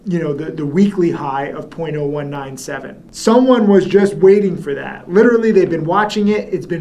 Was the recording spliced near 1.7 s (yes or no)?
no